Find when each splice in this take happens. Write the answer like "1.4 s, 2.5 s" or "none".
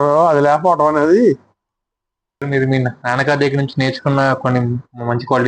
2.4 s